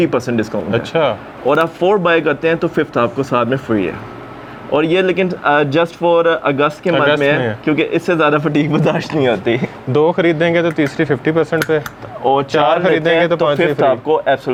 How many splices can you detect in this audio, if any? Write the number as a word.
zero